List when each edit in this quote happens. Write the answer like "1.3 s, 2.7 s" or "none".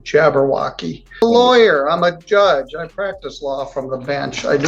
1.2 s